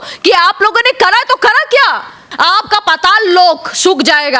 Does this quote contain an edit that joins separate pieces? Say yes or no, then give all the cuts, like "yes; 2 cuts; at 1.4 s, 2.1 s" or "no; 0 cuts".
yes; 1 cut; at 2.2 s